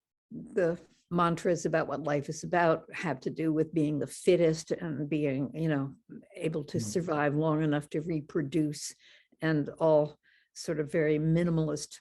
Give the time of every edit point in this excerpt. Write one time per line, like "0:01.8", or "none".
0:01.0